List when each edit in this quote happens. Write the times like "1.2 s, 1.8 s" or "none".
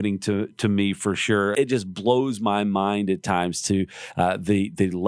1.5 s

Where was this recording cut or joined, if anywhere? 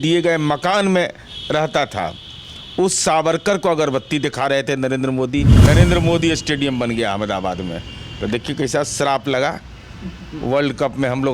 5.5 s

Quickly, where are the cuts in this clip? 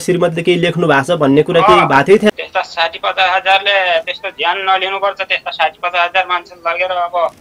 2.3 s

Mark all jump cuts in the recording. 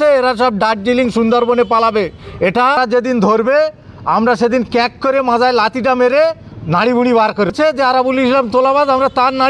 2.8 s, 7.5 s

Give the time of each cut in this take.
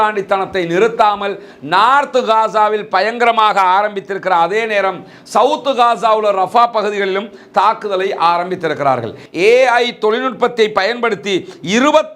9.2 s

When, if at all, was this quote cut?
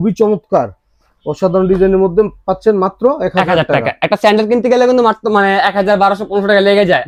none

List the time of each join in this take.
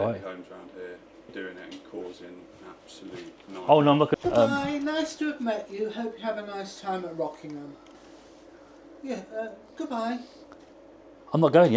4.1 s, 8.0 s

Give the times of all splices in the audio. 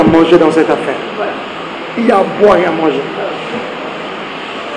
none

